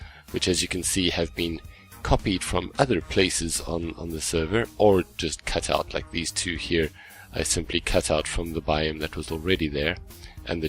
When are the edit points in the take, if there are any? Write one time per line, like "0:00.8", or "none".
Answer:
none